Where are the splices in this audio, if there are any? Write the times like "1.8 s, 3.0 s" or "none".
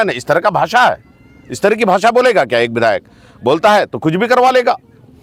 none